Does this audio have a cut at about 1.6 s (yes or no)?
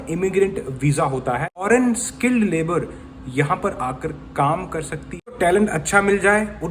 yes